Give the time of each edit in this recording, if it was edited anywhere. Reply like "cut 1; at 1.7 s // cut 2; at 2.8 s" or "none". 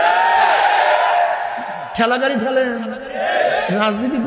none